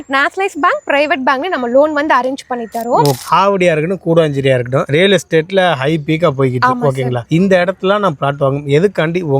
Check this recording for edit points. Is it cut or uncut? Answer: cut